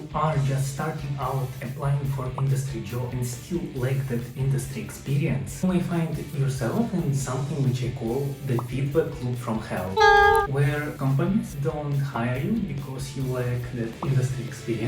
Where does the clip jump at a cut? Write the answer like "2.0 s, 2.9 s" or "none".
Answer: none